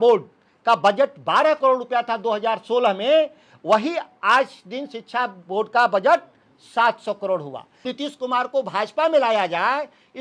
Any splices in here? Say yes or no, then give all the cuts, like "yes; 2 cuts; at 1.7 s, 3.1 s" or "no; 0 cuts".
yes; 1 cut; at 7.9 s